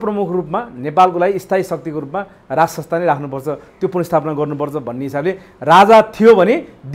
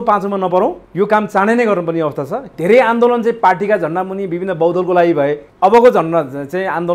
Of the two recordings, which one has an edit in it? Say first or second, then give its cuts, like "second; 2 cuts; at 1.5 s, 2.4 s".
second; 3 cuts; at 0.8 s, 2.5 s, 5.4 s